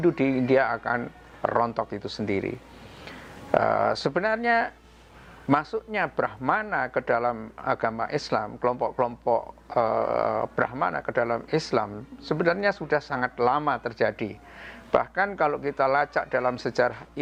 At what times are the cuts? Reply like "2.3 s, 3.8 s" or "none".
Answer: none

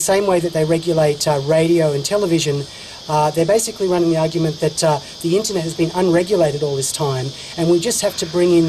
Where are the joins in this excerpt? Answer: 5.3 s

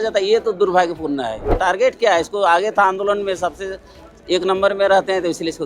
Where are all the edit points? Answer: 1.5 s

